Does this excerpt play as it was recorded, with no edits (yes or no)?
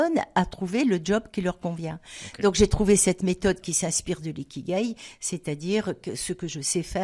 yes